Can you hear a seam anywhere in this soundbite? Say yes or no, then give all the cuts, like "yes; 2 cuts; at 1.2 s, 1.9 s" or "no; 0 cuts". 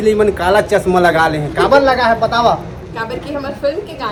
no; 0 cuts